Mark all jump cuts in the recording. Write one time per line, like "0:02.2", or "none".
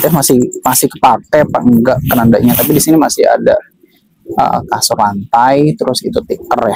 none